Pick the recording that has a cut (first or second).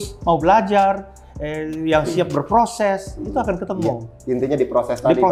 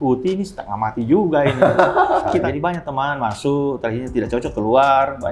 second